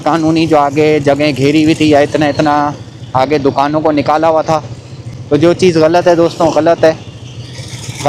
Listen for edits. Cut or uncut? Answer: uncut